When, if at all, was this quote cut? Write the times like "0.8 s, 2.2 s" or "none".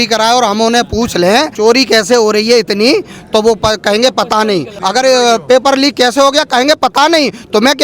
1.5 s, 4.7 s